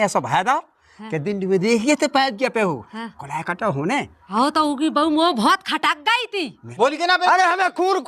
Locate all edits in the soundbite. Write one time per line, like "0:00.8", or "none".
0:04.2
0:06.6